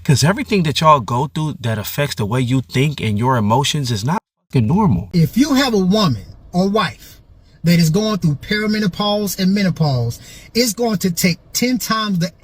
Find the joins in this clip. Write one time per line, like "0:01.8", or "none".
0:05.0